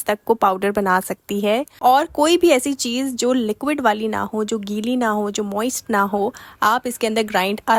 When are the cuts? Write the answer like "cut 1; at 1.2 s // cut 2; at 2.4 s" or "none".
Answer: none